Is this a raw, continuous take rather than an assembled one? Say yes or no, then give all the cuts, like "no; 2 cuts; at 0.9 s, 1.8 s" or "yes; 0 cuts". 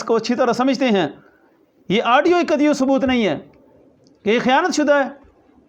yes; 0 cuts